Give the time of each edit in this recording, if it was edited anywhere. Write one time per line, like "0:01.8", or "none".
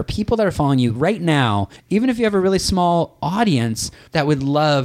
0:01.7
0:04.0